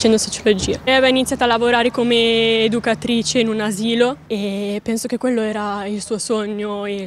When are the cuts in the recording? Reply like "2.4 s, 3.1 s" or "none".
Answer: none